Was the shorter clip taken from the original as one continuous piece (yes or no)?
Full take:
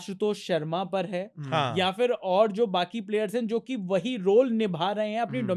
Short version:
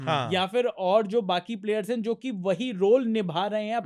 yes